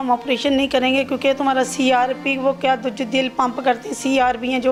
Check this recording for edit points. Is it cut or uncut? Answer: uncut